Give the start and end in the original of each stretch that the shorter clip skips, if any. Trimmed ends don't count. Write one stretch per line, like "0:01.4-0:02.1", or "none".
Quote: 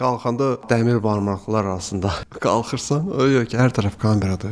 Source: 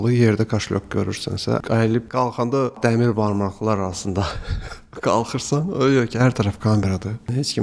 0:04.4-0:04.9